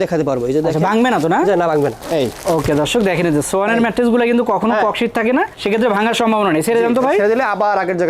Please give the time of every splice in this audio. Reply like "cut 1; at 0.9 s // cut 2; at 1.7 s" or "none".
cut 1; at 2.0 s // cut 2; at 5.6 s

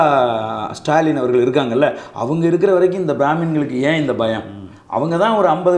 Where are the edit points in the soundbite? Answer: none

